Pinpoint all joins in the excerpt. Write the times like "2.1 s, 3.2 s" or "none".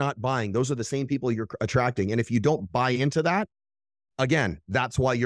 none

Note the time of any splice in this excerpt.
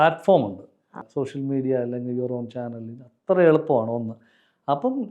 1.0 s

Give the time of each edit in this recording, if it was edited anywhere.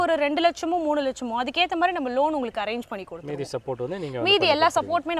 none

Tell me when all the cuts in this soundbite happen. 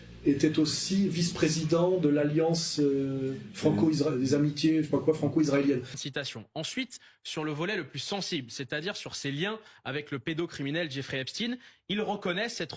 5.9 s

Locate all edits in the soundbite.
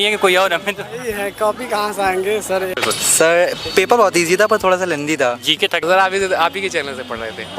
2.7 s, 5.8 s

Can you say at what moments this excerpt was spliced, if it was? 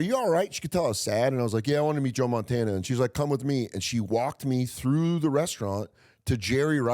2.8 s

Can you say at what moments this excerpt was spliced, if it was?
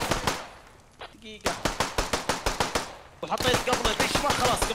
3.1 s

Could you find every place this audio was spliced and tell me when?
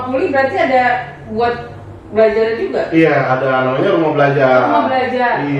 none

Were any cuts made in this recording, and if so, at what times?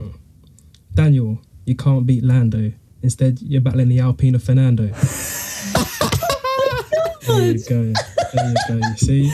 none

